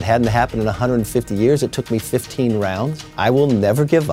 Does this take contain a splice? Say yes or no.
yes